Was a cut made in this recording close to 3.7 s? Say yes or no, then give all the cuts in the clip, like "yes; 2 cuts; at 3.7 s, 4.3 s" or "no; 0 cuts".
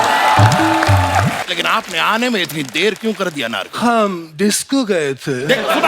no; 1 cut; at 1.4 s